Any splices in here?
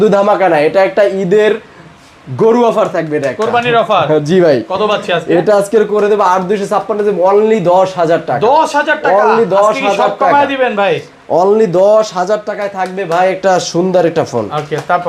no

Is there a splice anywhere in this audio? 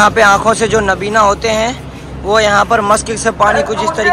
no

